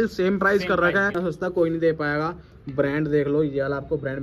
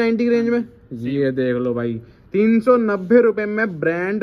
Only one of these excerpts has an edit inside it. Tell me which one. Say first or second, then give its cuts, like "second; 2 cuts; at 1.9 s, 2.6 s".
first; 1 cut; at 1.2 s